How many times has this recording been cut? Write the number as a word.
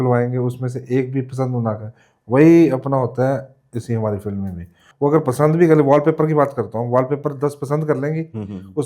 one